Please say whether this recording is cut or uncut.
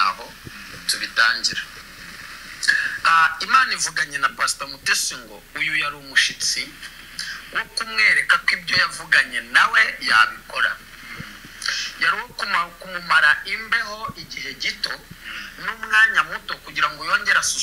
uncut